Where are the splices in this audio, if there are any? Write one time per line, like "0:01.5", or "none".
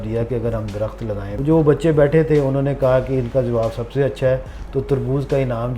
0:01.3